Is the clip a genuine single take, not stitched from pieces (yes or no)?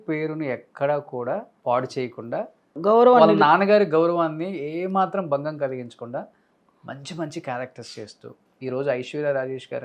no